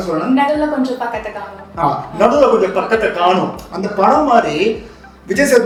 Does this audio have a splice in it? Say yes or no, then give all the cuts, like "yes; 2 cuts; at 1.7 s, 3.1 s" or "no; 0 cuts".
no; 0 cuts